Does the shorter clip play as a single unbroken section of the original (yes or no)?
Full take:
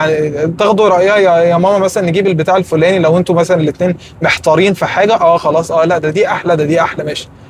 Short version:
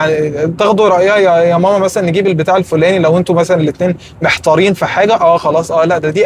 yes